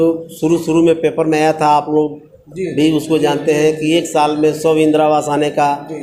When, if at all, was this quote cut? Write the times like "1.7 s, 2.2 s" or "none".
none